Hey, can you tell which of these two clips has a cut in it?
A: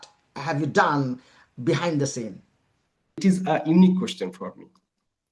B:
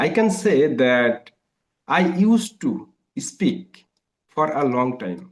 A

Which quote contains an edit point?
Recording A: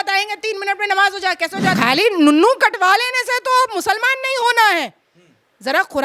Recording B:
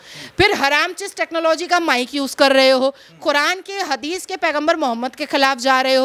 A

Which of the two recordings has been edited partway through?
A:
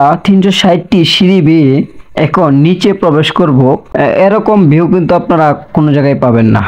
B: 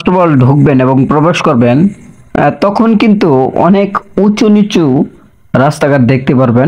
A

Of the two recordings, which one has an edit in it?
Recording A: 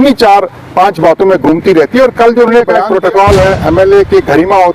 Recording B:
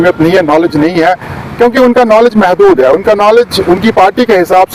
A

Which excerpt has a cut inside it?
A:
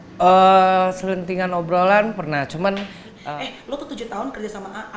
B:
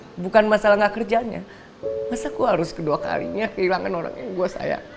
A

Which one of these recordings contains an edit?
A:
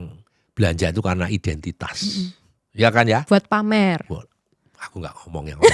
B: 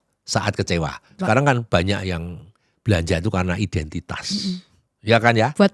B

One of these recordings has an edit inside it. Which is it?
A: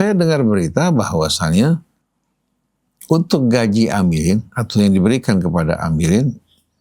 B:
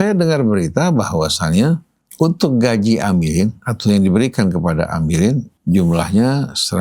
B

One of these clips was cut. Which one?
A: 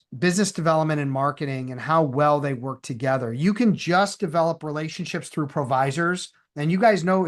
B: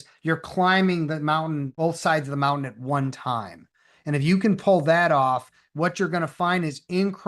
B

